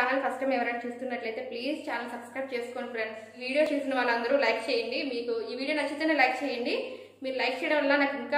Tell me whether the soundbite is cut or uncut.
cut